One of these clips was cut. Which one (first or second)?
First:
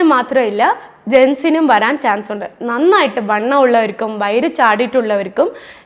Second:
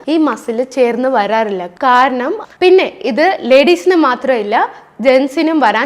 second